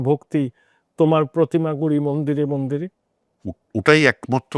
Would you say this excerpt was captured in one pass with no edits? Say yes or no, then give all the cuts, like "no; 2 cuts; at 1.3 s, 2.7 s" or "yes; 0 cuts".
yes; 0 cuts